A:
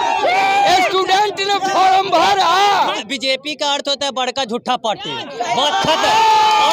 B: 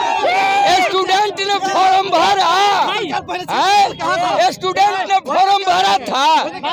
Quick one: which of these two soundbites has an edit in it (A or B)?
A